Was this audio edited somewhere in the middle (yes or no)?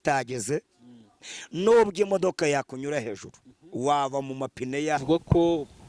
yes